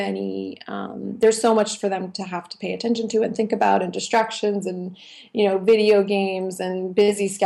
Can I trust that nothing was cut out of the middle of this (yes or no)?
yes